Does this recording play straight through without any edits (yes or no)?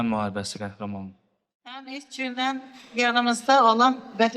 no